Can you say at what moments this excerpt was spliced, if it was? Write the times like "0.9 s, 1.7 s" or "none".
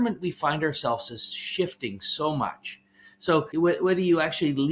3.5 s

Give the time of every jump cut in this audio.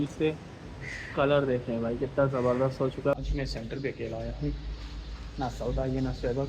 3.2 s

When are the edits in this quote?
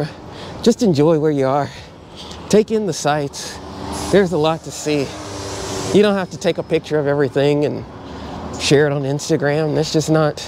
none

